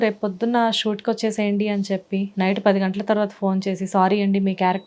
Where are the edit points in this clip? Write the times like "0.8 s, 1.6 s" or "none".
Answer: 2.3 s